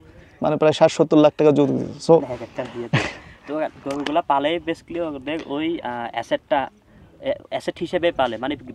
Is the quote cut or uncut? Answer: uncut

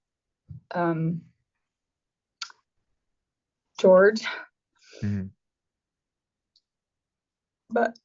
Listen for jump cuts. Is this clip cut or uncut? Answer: uncut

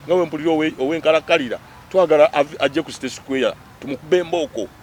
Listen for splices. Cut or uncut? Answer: uncut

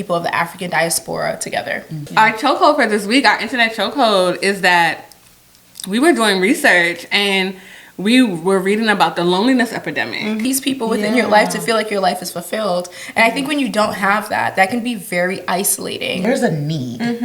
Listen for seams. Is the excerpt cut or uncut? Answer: cut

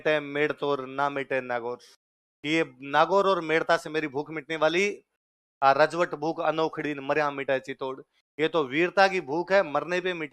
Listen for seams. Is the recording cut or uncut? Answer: uncut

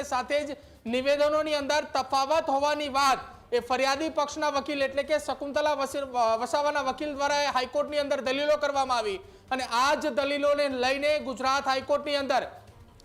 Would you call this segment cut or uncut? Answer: uncut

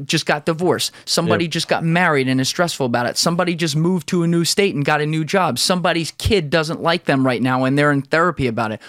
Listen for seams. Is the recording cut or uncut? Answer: uncut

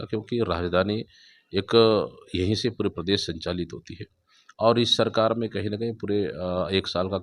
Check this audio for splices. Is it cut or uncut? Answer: uncut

